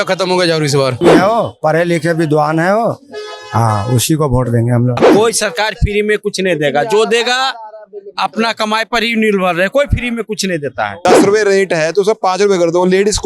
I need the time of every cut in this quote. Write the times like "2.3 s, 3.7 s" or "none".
1.0 s, 5.0 s, 11.0 s